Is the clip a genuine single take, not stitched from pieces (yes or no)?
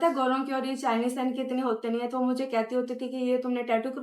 yes